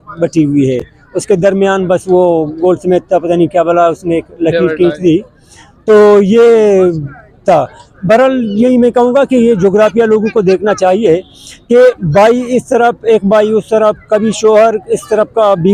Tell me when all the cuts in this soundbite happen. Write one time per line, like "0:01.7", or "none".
none

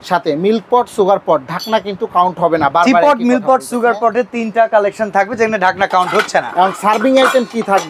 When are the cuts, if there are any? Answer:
none

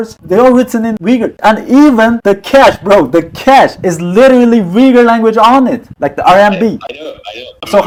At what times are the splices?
none

